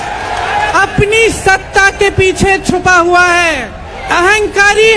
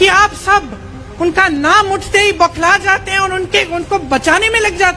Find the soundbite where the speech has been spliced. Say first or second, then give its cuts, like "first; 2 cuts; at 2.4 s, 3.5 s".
first; 2 cuts; at 0.7 s, 3.9 s